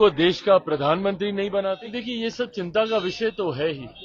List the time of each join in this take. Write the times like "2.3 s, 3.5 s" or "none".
1.9 s